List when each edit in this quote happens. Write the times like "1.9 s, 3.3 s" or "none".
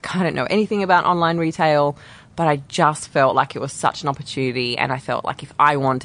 none